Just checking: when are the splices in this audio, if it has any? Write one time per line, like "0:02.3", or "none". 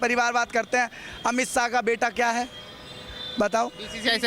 none

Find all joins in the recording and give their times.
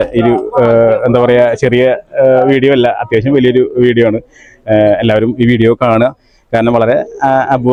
none

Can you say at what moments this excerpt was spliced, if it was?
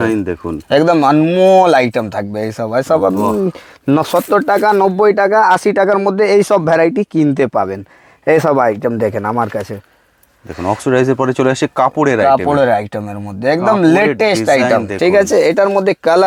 none

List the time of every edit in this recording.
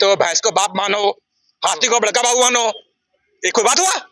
none

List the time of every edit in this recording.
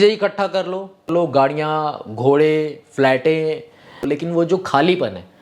0:01.1
0:04.1

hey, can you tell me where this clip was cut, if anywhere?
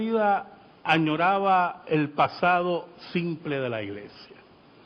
0:02.8

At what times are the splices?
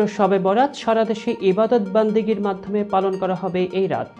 none

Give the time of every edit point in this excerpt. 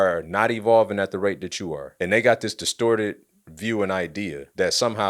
none

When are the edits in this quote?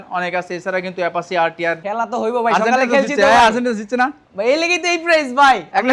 0:01.8

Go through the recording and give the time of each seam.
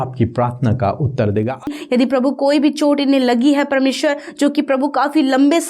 0:01.8

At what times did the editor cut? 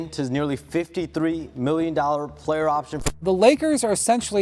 0:03.1

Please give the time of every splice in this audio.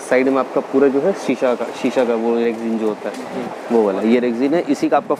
none

